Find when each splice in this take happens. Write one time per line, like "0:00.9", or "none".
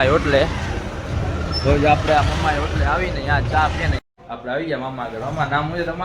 0:04.0